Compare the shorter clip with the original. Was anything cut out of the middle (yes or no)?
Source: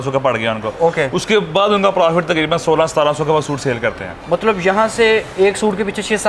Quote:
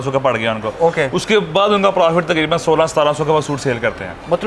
no